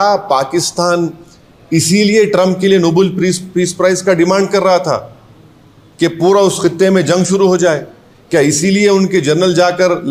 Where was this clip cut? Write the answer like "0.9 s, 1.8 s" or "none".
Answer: none